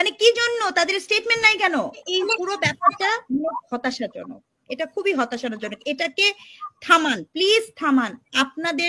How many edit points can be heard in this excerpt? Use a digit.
1